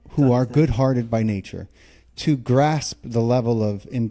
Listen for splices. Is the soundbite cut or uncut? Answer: uncut